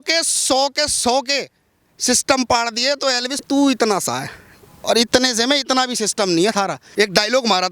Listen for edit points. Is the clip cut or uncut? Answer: cut